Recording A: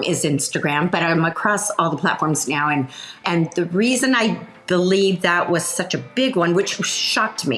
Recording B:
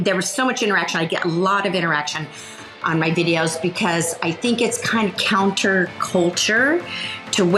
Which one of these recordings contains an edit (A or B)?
A